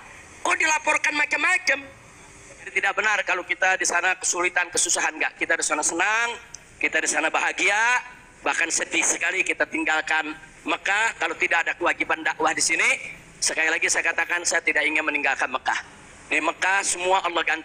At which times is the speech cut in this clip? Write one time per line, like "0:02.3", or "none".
0:02.7